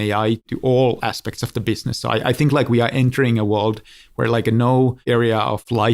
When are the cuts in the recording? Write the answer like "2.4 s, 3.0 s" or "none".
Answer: none